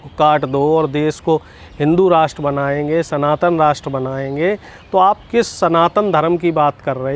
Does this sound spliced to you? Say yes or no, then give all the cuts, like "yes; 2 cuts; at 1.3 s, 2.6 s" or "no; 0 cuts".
no; 0 cuts